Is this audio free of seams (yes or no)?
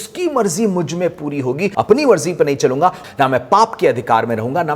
no